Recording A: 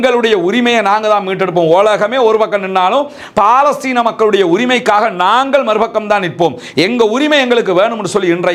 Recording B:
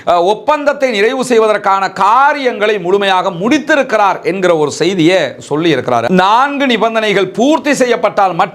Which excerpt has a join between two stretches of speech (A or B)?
B